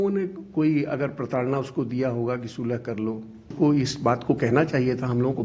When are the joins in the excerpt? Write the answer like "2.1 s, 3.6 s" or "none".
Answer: 3.5 s